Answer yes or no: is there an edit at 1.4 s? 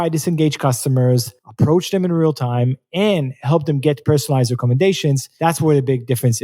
yes